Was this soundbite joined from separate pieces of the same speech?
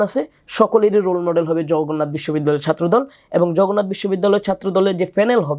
no; 0 cuts

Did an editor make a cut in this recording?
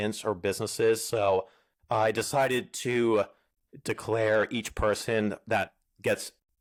no; 0 cuts

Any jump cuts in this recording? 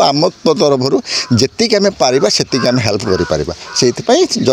no; 0 cuts

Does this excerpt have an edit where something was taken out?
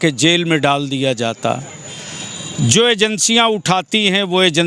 no; 0 cuts

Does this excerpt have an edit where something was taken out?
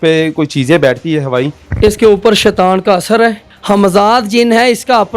yes; 2 cuts; at 1.7 s, 3.5 s

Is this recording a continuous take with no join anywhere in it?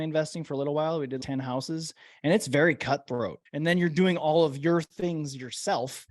no; 2 cuts; at 1.2 s, 3.4 s

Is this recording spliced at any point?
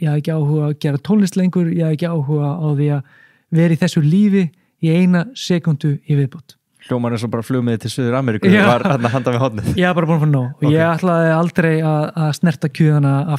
no; 0 cuts

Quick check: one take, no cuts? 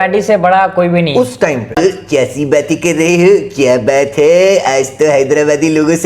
no; 1 cut; at 1.8 s

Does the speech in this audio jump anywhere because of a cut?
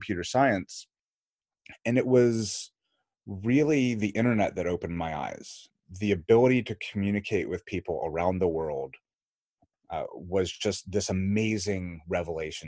no; 0 cuts

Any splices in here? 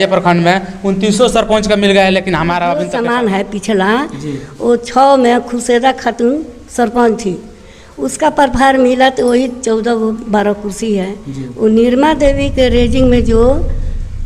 yes; 1 cut; at 2.9 s

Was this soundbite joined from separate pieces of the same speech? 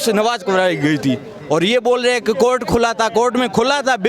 no; 0 cuts

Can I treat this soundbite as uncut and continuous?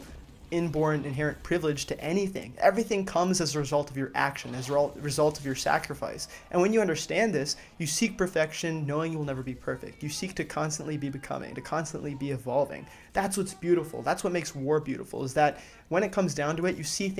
yes; 0 cuts

